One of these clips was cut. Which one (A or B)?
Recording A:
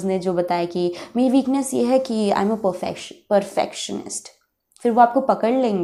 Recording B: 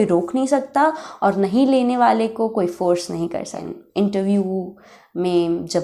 B